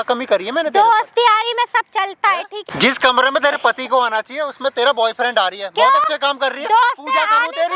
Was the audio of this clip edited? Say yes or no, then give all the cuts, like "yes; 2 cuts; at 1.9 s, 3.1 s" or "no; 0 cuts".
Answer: yes; 1 cut; at 2.7 s